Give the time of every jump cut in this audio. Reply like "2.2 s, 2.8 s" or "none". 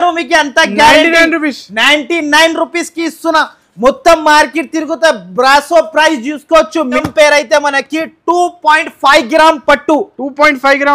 7.0 s